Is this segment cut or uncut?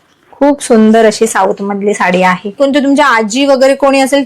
cut